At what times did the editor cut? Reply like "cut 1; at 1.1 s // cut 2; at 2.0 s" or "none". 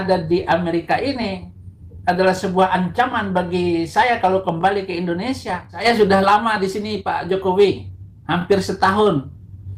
cut 1; at 5.8 s

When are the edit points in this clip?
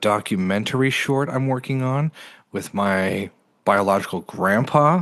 none

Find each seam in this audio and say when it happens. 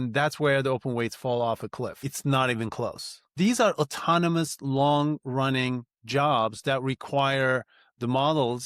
cut 1; at 2.0 s // cut 2; at 3.3 s

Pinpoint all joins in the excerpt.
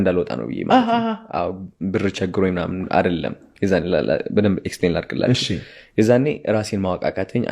none

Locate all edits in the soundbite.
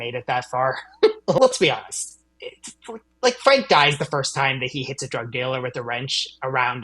cut 1; at 1.4 s

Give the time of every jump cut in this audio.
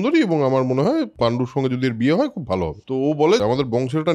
cut 1; at 1.1 s // cut 2; at 3.3 s

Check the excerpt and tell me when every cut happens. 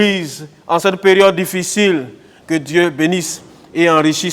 cut 1; at 2.3 s

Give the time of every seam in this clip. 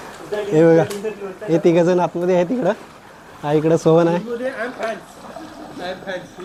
none

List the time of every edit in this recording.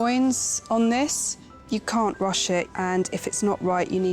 cut 1; at 1.5 s // cut 2; at 2.7 s

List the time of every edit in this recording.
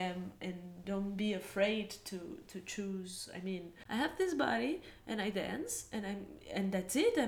cut 1; at 3.7 s

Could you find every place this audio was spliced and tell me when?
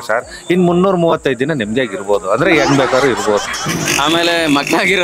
cut 1; at 3.5 s

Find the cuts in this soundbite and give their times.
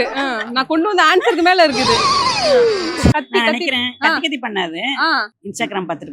cut 1; at 3.1 s

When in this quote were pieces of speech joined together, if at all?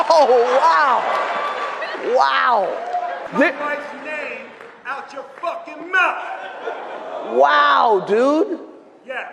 cut 1; at 3.2 s

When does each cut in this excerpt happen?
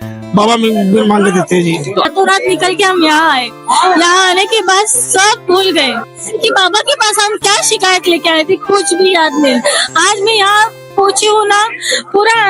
cut 1; at 2.1 s

